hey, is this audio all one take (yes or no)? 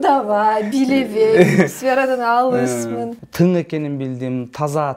no